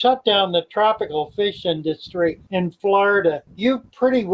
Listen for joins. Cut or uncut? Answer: cut